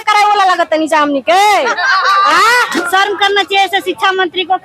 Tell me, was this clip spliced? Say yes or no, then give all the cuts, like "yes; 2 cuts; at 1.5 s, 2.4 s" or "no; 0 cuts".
yes; 1 cut; at 2.8 s